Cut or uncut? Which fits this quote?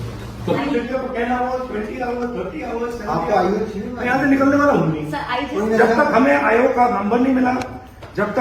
uncut